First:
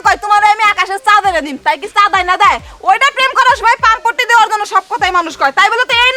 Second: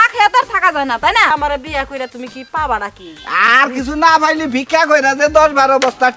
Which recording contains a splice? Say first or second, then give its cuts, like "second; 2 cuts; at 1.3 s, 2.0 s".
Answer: second; 1 cut; at 1.3 s